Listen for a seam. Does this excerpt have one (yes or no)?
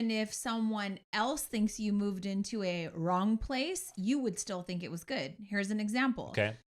no